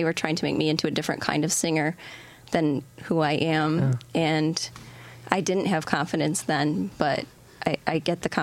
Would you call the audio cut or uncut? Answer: uncut